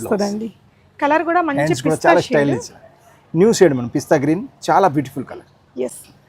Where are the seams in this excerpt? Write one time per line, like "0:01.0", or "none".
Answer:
none

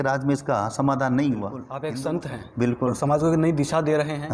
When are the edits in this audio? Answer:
0:01.8

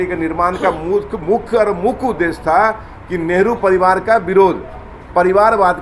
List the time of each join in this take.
none

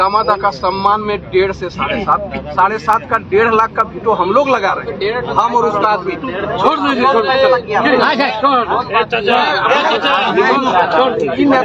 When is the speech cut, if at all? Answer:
none

